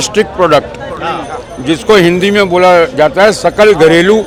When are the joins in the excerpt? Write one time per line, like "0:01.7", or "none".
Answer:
none